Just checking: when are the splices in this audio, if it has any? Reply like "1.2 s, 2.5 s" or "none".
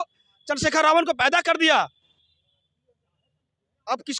none